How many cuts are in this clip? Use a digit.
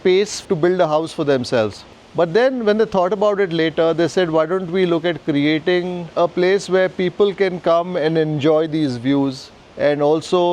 1